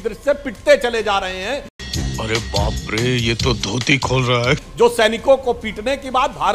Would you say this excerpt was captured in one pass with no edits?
no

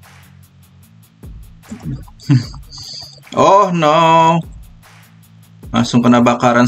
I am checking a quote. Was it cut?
yes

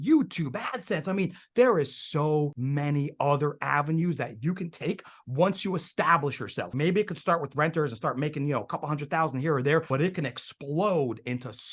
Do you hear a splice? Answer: yes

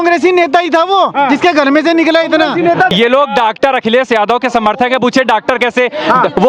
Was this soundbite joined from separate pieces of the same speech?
yes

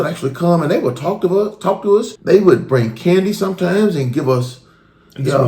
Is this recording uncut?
no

